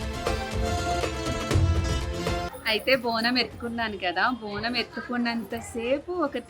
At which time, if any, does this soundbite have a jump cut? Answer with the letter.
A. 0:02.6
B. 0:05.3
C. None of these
A